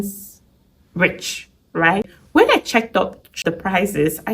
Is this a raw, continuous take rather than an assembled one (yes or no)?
no